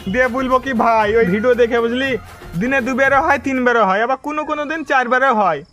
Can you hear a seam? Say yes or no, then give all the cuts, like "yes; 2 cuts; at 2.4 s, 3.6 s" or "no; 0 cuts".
yes; 1 cut; at 1.3 s